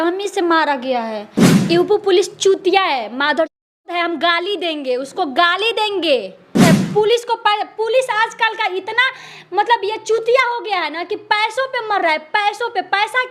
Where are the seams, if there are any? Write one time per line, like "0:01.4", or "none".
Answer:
0:01.5
0:06.6